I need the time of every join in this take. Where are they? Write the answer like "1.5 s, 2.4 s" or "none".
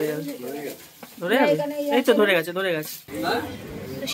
3.0 s